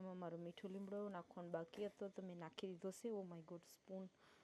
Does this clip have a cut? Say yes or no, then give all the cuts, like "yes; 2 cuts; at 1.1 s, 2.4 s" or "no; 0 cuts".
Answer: no; 0 cuts